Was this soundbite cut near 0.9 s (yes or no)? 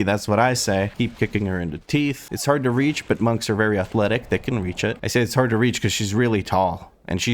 yes